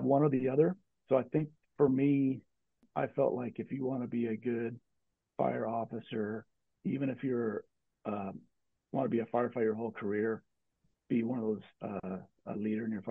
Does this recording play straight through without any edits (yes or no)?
yes